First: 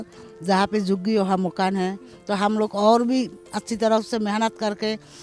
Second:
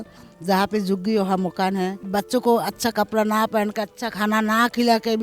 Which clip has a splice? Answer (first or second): second